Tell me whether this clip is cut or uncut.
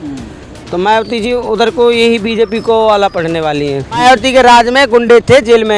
cut